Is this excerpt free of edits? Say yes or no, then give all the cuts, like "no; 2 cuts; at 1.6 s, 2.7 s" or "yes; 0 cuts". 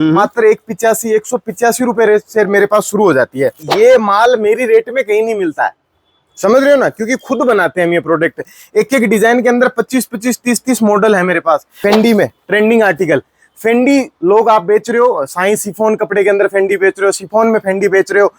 no; 2 cuts; at 3.6 s, 11.7 s